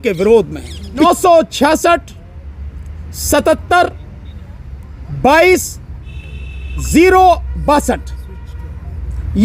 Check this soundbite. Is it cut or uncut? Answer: cut